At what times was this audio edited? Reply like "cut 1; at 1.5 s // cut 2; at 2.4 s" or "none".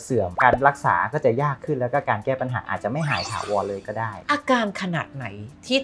cut 1; at 4.2 s